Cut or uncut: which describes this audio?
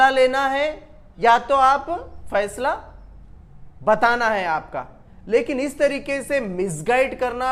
uncut